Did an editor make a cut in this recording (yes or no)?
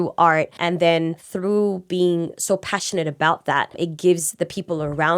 yes